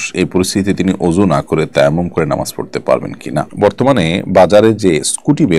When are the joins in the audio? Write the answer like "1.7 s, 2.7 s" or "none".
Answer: 3.5 s